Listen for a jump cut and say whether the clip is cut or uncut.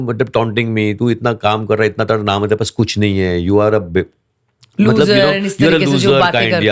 uncut